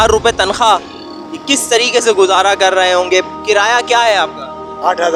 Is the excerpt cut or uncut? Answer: uncut